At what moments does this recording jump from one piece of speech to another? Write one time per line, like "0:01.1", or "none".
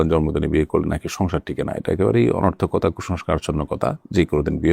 none